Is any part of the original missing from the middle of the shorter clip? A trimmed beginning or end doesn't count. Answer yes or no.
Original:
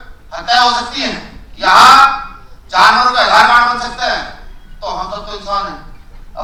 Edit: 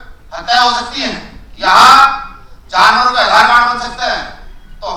no